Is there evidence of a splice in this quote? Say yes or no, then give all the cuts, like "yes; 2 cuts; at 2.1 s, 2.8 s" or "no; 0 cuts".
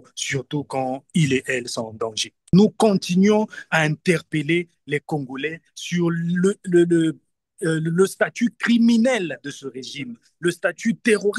yes; 1 cut; at 2.5 s